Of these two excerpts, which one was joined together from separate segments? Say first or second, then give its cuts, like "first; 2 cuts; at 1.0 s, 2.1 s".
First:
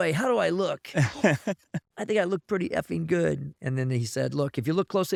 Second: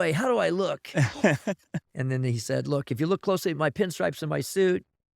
second; 1 cut; at 1.9 s